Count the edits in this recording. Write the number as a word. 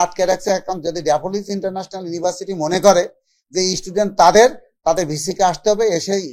zero